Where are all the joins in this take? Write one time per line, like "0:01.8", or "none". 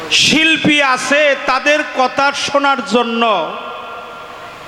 none